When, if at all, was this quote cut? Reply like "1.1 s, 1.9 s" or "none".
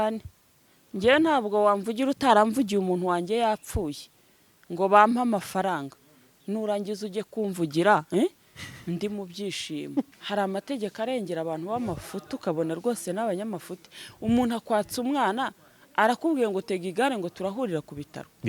10.1 s